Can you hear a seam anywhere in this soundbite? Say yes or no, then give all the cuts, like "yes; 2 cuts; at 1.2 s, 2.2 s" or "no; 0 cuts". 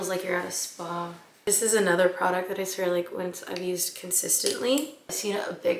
yes; 1 cut; at 1.3 s